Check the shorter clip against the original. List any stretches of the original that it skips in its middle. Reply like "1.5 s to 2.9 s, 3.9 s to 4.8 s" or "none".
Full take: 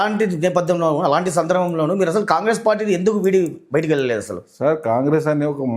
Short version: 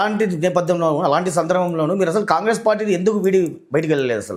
none